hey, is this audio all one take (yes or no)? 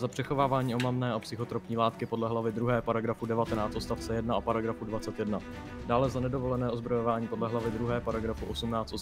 yes